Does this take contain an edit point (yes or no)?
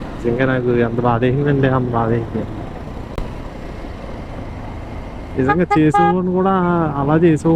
no